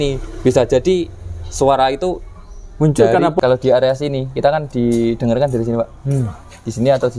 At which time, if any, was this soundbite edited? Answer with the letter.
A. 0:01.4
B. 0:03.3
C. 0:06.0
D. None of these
B